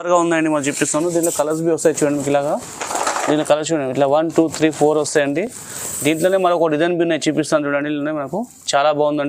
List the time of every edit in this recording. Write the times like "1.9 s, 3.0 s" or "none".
none